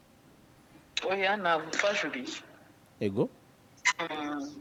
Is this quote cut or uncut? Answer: uncut